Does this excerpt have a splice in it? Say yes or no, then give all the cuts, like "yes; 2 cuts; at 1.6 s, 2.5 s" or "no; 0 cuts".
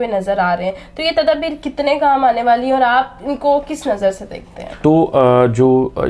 yes; 1 cut; at 4.6 s